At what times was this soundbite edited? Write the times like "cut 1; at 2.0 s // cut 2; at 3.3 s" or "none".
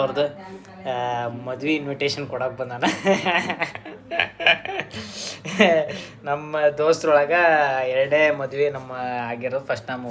none